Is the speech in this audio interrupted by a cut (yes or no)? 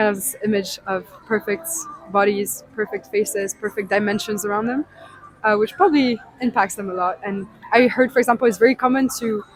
no